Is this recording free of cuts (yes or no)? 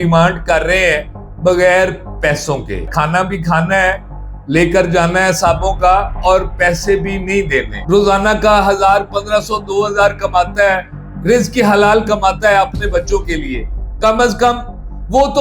no